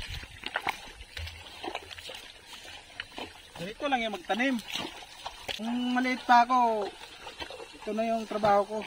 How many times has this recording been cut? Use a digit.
1